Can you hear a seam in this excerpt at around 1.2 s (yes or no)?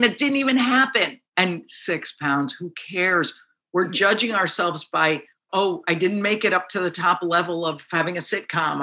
yes